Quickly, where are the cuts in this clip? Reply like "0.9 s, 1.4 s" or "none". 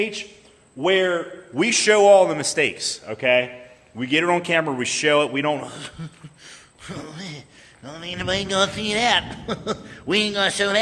none